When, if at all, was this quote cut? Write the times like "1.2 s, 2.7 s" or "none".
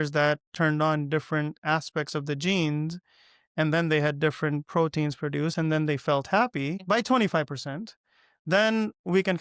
6.8 s